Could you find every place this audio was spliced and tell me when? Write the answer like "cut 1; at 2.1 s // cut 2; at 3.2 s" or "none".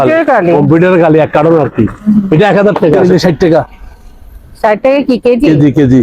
cut 1; at 3.0 s

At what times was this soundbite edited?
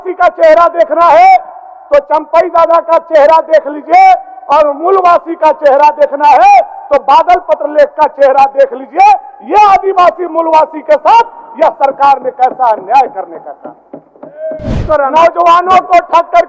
cut 1; at 14.8 s

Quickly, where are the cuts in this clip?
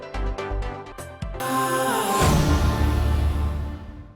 cut 1; at 1.0 s

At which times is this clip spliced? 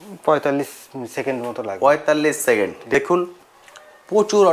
cut 1; at 2.9 s

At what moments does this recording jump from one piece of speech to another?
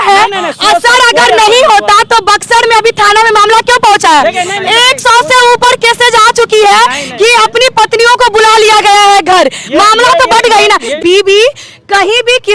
cut 1; at 11.0 s

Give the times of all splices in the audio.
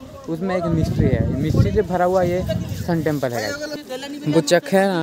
cut 1; at 3.6 s

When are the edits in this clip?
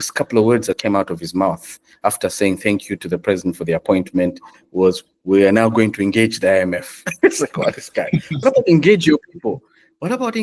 none

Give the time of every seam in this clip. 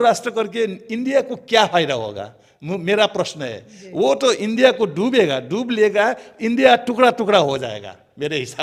none

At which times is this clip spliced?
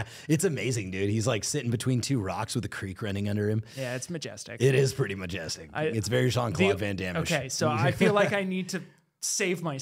none

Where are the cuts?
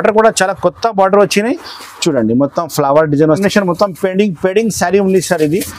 cut 1; at 3.4 s

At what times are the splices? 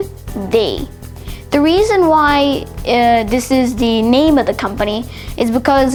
none

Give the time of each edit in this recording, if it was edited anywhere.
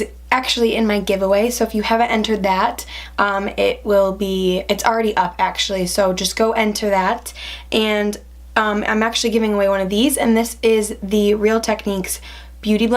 cut 1; at 1.9 s

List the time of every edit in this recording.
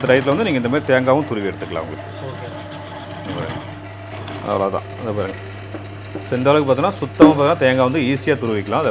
cut 1; at 4.1 s

